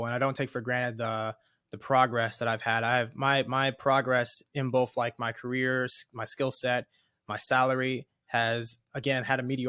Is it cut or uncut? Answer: uncut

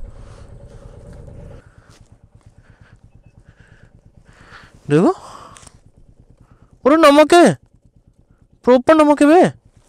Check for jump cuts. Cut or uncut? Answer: uncut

